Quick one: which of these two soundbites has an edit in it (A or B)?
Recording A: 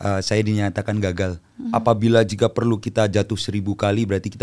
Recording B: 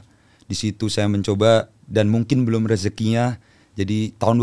A